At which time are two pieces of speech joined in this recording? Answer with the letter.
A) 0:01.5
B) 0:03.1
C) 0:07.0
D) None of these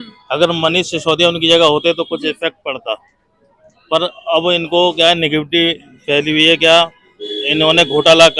D